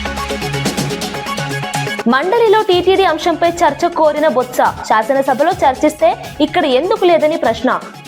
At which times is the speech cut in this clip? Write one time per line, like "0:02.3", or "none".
0:02.0